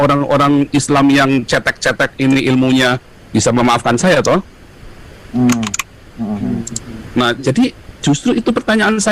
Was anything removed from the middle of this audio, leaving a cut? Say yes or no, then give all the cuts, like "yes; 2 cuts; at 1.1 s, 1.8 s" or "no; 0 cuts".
no; 0 cuts